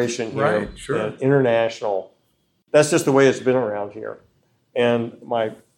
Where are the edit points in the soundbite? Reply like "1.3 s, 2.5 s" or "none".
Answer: 2.6 s